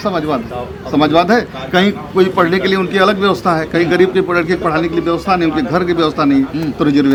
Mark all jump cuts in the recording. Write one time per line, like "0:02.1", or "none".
none